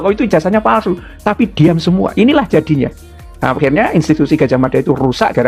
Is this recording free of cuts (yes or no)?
yes